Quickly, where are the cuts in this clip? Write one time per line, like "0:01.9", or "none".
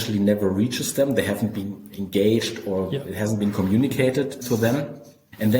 0:04.7